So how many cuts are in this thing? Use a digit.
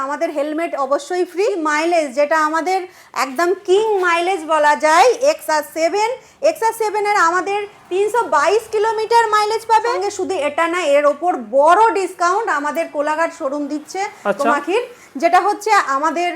2